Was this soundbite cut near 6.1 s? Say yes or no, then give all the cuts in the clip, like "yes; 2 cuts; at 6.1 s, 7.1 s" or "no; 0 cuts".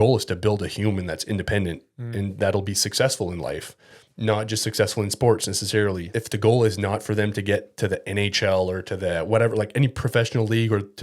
yes; 1 cut; at 6.1 s